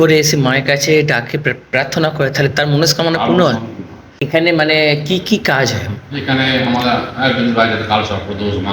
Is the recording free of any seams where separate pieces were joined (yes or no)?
no